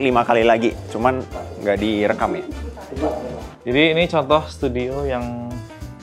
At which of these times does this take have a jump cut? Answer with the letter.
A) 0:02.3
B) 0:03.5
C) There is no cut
B